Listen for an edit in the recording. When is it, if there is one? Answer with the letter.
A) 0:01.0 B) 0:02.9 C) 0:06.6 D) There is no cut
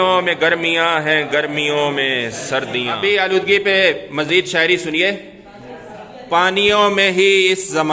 B